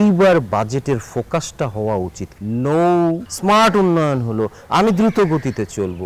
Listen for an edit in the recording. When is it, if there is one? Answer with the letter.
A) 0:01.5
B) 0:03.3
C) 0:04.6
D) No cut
B